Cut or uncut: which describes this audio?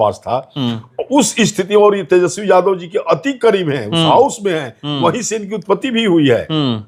uncut